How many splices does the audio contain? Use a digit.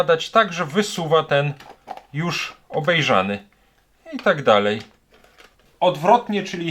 1